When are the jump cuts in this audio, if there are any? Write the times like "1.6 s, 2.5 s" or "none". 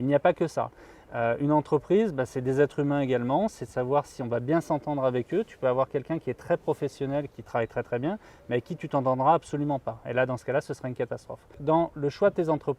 11.5 s